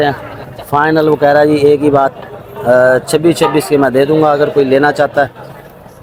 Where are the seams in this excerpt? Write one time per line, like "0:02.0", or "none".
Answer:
none